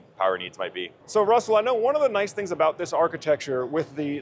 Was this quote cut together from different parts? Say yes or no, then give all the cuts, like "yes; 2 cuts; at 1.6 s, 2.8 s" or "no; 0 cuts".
no; 0 cuts